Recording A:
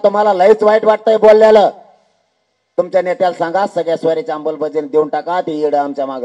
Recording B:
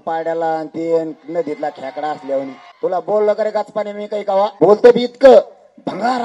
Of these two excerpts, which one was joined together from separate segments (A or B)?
B